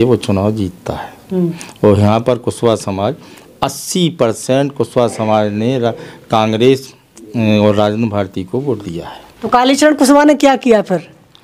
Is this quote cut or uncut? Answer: uncut